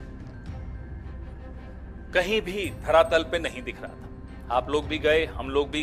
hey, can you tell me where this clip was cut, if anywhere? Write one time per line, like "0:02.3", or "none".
none